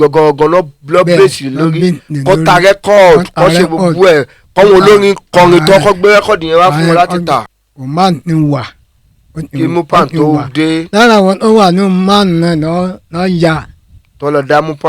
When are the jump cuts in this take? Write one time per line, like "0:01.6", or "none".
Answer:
0:07.5